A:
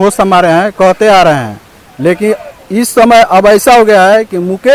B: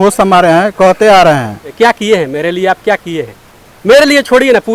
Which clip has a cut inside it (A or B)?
B